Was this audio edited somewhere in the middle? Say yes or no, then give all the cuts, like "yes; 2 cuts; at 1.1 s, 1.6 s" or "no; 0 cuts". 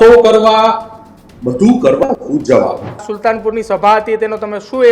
yes; 1 cut; at 3.1 s